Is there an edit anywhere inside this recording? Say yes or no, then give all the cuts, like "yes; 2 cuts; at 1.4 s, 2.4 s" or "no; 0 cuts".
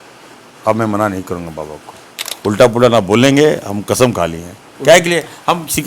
yes; 1 cut; at 2.3 s